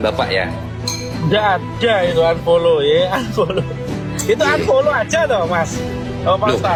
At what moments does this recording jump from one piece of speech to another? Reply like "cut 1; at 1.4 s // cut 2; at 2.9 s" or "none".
none